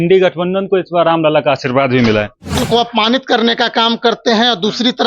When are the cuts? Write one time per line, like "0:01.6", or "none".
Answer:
0:02.6